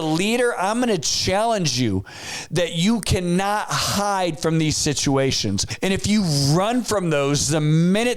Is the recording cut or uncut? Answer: cut